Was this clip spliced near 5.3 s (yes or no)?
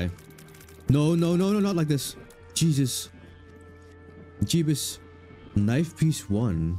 no